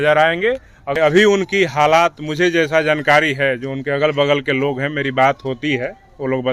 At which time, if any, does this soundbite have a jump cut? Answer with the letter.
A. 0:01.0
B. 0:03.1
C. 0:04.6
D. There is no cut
A